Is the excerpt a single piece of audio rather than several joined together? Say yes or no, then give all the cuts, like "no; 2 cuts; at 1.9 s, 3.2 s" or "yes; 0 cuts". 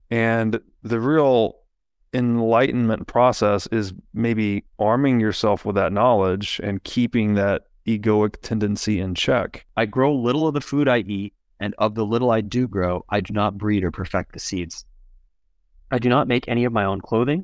no; 1 cut; at 9.6 s